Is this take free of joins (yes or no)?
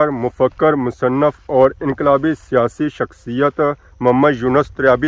yes